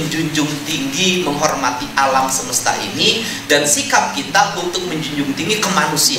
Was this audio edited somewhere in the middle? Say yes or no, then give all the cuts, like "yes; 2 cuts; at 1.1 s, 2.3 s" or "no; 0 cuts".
no; 0 cuts